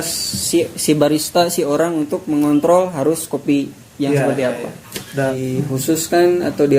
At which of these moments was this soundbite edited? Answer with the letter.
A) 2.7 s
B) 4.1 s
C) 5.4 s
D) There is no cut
C